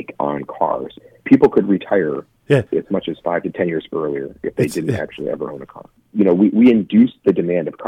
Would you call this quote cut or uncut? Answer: cut